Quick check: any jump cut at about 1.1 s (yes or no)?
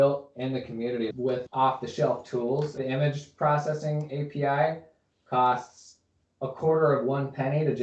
yes